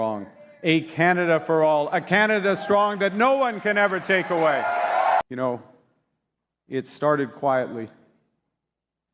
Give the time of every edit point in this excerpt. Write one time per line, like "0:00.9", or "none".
0:05.2